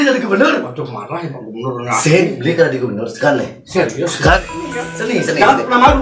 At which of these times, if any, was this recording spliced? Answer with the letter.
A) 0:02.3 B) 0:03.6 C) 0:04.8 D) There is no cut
C